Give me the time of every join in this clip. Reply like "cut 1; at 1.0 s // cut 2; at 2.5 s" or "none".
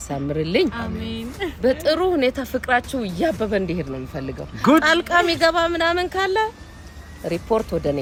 none